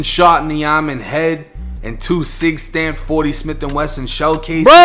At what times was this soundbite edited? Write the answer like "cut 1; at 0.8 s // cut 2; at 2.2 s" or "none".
none